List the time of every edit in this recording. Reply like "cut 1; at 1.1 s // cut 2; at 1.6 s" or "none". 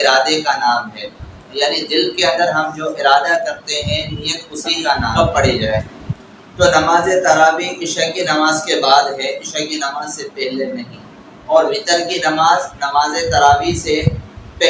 cut 1; at 5.1 s